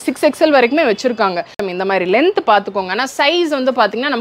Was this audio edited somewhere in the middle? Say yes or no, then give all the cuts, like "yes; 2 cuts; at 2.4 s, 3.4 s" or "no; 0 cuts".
yes; 1 cut; at 1.6 s